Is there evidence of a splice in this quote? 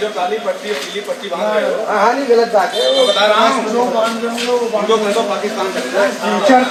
no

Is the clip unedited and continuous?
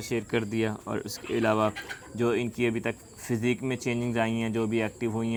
yes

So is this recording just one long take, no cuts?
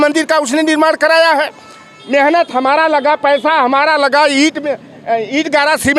yes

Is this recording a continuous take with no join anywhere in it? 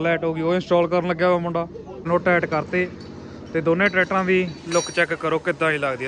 no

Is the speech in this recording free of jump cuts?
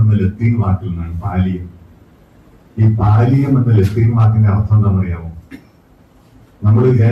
yes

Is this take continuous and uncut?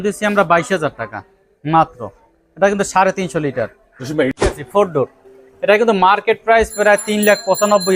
no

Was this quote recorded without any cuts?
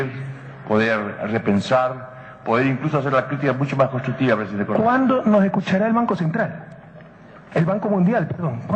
yes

